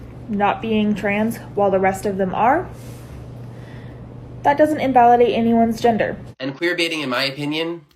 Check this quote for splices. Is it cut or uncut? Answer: cut